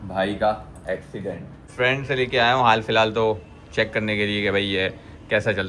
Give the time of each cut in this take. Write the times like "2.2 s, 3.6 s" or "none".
1.6 s